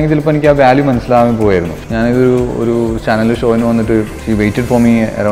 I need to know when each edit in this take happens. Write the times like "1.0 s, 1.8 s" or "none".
1.8 s, 4.2 s